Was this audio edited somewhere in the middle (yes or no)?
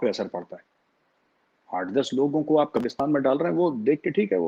no